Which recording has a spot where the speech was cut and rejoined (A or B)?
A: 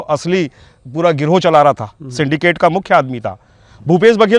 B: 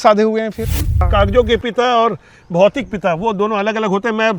B